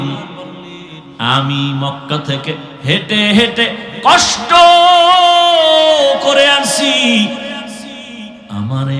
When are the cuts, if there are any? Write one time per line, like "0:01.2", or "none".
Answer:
none